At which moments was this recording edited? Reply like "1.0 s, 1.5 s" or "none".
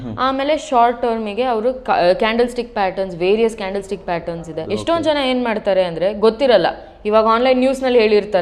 4.4 s